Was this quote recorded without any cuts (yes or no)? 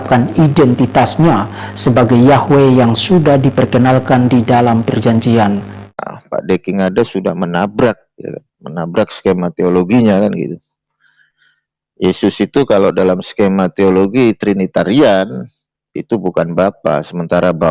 no